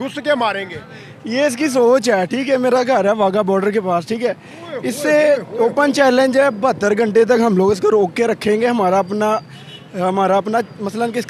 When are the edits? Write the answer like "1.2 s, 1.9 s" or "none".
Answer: none